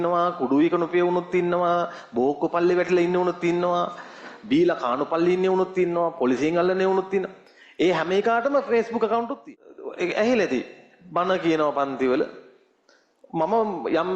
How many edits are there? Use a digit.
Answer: 1